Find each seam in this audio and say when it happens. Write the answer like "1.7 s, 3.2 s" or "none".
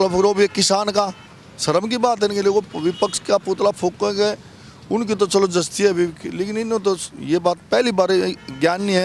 none